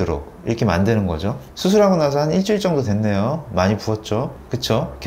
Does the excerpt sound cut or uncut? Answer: uncut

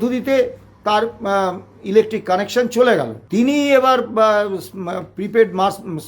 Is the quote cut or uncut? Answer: cut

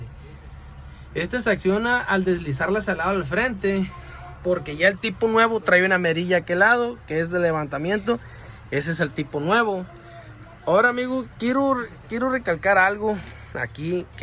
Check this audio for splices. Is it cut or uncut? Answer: uncut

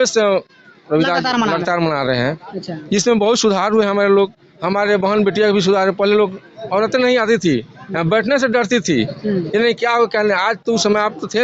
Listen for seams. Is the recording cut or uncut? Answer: uncut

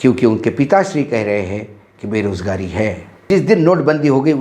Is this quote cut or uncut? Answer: cut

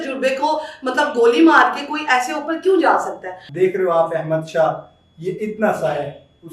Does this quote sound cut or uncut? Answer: cut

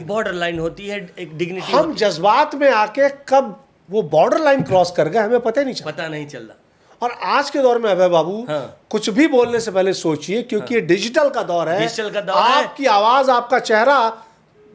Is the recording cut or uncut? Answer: uncut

